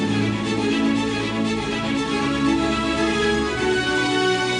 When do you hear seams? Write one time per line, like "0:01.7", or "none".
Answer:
none